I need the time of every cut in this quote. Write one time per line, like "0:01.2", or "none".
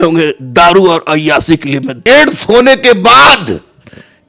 0:01.9